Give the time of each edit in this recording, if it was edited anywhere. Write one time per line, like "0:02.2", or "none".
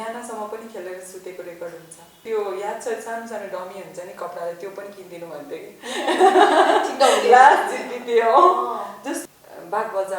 0:02.2
0:09.2